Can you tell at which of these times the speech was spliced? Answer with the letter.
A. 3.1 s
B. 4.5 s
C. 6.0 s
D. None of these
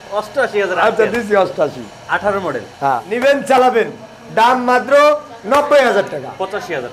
A